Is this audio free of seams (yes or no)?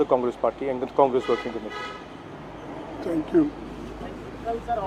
yes